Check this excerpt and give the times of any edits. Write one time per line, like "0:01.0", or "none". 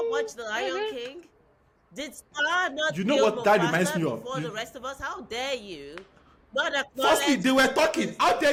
none